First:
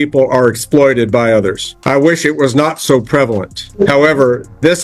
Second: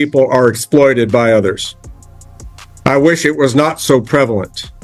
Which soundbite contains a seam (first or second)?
first